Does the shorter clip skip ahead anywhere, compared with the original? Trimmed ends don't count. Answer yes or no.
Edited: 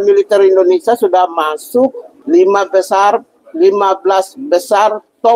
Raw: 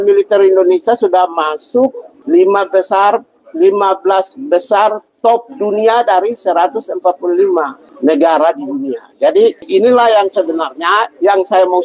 no